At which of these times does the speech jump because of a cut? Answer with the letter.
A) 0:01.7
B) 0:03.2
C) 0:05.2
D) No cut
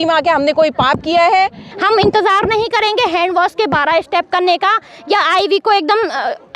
A